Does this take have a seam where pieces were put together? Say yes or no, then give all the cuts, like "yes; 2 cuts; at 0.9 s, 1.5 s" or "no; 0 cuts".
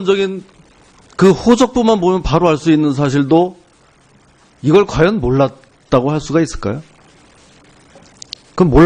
yes; 1 cut; at 1.3 s